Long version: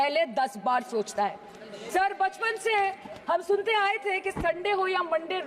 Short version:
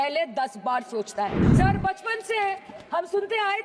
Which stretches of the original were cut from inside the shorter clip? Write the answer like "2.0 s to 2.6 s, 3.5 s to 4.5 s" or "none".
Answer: 1.4 s to 1.8 s